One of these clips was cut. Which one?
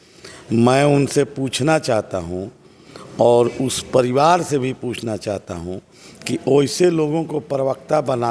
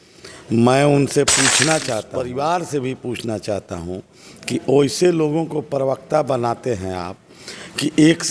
second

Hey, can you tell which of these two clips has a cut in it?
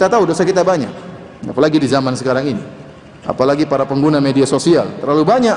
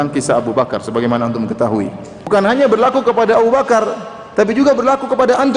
second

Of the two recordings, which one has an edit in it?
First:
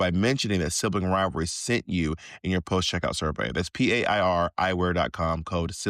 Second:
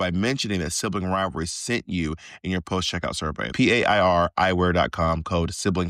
second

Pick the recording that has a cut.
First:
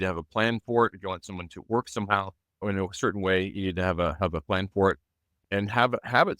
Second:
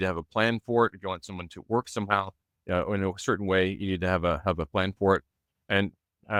first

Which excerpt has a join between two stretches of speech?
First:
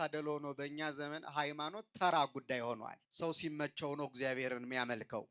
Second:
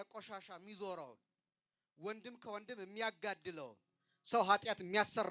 first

